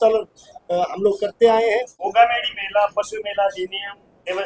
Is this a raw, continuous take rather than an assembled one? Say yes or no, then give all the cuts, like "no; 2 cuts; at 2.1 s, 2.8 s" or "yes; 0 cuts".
no; 1 cut; at 2.0 s